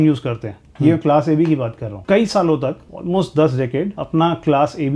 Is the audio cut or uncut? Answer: cut